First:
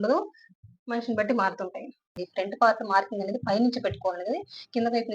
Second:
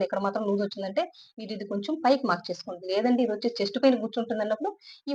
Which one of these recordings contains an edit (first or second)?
first